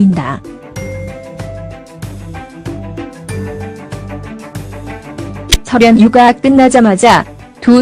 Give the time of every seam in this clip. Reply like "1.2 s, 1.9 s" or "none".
none